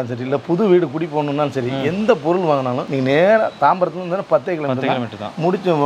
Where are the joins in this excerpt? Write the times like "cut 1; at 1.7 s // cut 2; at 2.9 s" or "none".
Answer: cut 1; at 2.8 s